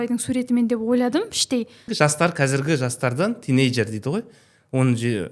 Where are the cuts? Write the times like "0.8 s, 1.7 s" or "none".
1.8 s